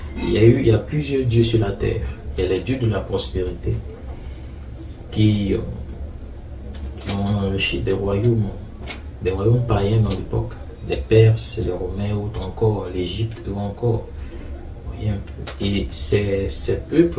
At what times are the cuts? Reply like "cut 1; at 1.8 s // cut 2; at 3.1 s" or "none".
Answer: none